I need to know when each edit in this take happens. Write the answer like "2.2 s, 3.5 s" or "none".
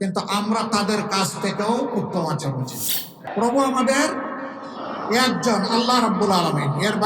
3.2 s